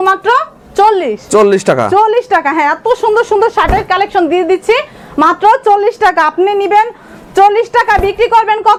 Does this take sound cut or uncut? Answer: uncut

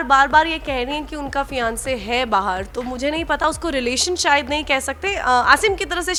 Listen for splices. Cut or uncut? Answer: uncut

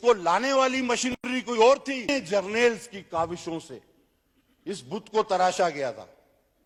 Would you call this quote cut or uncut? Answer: uncut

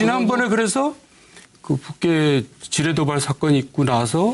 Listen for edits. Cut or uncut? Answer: uncut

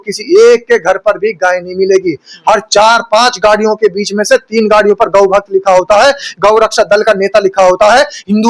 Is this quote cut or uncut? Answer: uncut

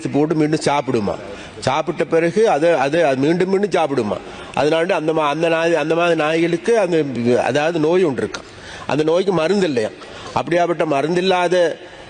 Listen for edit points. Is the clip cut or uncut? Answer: uncut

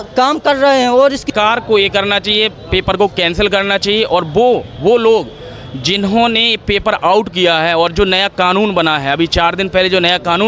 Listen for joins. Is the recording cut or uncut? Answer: cut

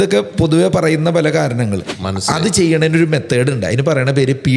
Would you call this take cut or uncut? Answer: cut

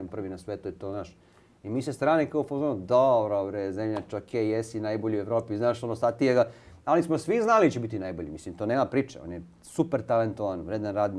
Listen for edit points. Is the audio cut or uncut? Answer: uncut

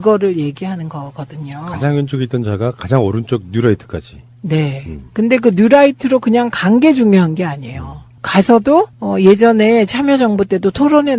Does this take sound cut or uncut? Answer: cut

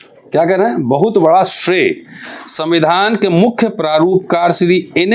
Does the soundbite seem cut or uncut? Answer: uncut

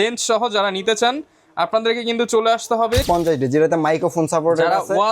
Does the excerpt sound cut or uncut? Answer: cut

